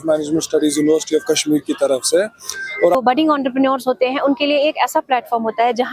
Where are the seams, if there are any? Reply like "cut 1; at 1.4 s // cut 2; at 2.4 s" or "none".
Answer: cut 1; at 2.9 s